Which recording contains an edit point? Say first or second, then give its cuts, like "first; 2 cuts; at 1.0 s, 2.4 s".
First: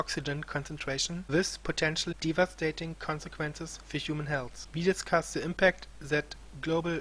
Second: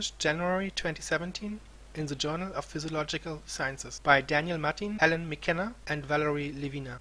first; 1 cut; at 5.6 s